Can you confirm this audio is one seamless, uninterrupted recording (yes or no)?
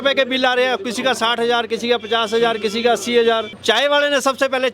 no